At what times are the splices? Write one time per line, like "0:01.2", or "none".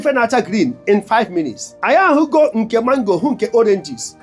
0:01.7